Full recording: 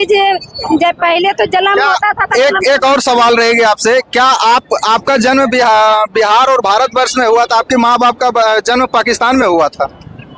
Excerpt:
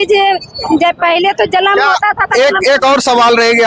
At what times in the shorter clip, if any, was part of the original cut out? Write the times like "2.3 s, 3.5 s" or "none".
none